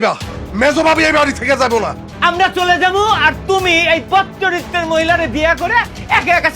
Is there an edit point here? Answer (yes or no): yes